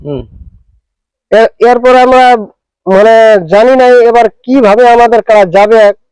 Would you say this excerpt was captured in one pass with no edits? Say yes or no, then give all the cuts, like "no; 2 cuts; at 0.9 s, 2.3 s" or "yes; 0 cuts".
yes; 0 cuts